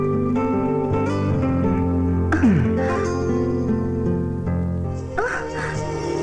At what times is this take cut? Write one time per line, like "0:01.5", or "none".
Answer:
none